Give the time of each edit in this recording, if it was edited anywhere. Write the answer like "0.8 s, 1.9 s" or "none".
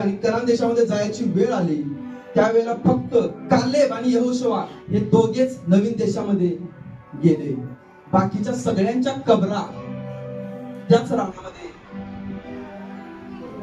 3.4 s